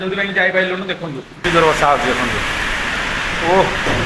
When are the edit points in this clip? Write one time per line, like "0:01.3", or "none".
0:01.4